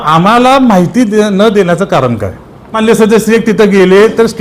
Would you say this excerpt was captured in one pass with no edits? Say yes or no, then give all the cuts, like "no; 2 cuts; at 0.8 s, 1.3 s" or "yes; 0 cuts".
no; 1 cut; at 2.8 s